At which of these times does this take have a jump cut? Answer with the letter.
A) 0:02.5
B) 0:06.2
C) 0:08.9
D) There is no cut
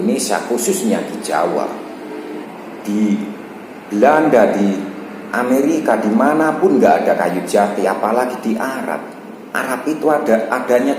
A